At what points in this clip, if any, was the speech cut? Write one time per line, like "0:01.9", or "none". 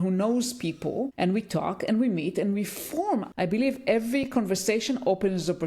0:03.3